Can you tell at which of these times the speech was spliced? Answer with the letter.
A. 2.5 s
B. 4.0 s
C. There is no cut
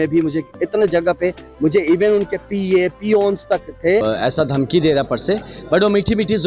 B